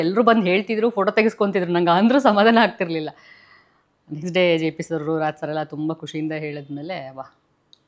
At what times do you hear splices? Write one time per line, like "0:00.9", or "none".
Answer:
none